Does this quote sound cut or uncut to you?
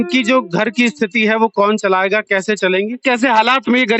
cut